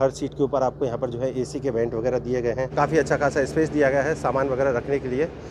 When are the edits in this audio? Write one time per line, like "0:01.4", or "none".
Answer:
0:02.7